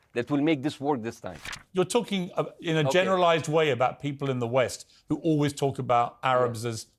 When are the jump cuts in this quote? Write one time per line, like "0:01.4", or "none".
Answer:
none